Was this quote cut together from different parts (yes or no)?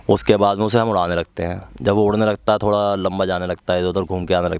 no